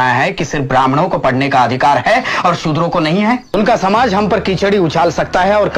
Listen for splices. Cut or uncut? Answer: cut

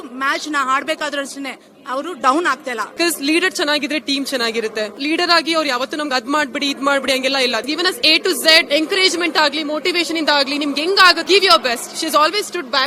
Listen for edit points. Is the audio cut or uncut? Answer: cut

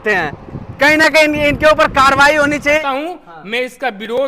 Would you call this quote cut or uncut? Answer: cut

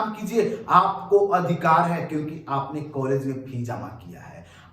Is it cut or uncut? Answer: uncut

